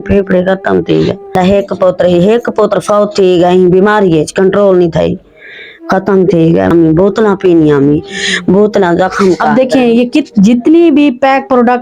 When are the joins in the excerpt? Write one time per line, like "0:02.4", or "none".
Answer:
0:01.4
0:06.7